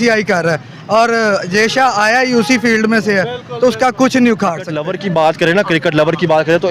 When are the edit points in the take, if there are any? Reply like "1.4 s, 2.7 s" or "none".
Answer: 4.9 s